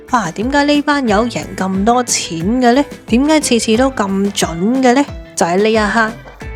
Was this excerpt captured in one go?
yes; 0 cuts

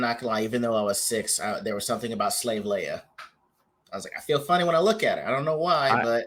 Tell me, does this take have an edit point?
no; 0 cuts

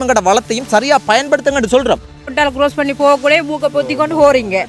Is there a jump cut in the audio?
yes; 1 cut; at 2.3 s

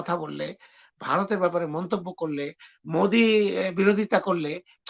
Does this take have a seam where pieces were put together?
no; 0 cuts

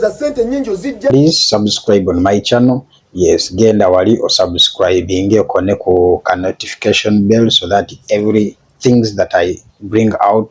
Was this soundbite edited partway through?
yes; 1 cut; at 1.1 s

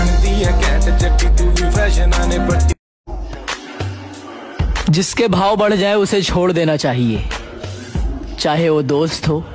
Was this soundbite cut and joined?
yes; 1 cut; at 2.9 s

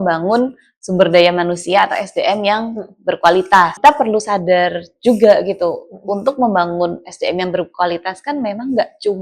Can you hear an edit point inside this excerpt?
yes; 1 cut; at 3.7 s

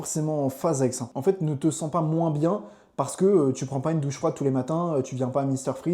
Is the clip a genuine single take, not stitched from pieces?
no; 1 cut; at 1.1 s

